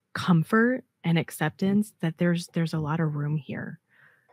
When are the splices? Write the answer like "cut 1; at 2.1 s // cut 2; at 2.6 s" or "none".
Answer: none